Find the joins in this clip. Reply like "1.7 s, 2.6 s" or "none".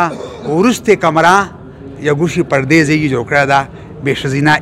none